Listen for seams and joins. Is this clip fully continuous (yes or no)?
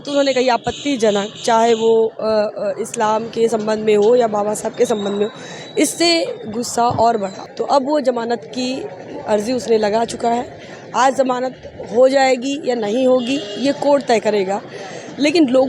no